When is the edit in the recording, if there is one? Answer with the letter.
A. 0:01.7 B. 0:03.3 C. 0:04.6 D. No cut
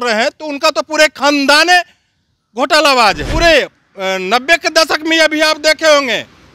B